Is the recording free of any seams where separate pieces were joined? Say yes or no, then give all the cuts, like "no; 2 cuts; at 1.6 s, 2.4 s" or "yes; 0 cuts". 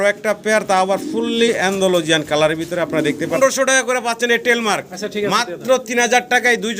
no; 1 cut; at 3.4 s